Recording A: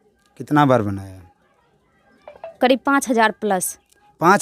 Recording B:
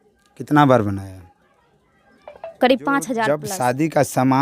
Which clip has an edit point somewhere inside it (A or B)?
B